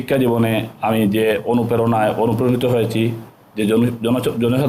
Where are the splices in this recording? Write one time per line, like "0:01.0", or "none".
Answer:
none

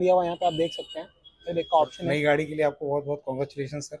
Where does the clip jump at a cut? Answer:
0:02.0

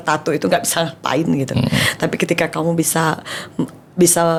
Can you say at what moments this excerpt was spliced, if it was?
none

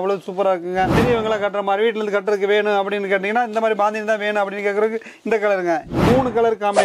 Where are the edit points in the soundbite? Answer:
0:01.0
0:05.9

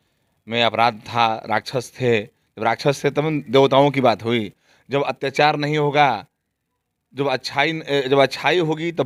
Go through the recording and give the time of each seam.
none

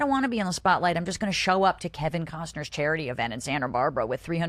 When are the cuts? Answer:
none

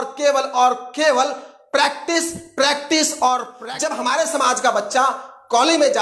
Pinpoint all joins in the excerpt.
0:03.5

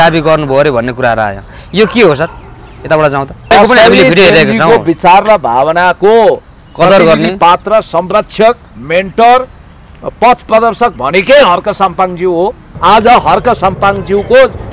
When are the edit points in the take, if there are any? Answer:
0:03.5
0:12.7

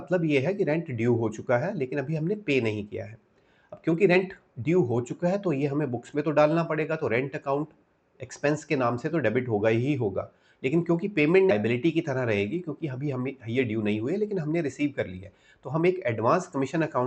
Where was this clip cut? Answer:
0:11.5

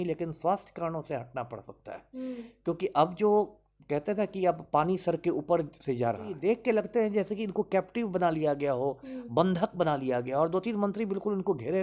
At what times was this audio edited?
0:06.3

